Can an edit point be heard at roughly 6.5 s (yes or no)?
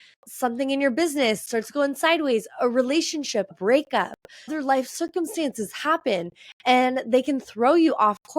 no